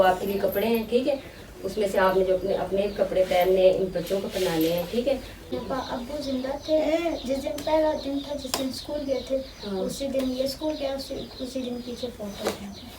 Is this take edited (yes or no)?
yes